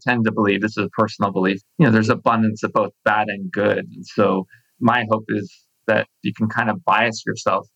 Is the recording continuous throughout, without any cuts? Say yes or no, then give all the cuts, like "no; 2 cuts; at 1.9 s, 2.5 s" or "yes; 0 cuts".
no; 2 cuts; at 1.6 s, 6.2 s